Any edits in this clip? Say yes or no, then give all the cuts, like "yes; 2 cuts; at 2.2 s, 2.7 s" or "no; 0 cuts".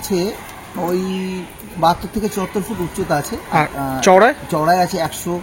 no; 0 cuts